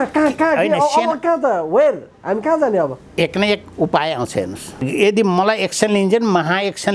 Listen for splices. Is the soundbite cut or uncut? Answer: cut